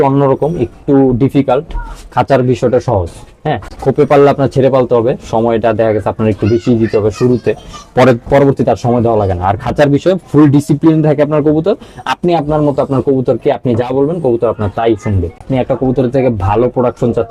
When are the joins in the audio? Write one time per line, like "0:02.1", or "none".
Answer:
0:03.7
0:15.4